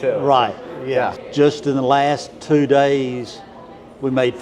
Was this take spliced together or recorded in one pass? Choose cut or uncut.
cut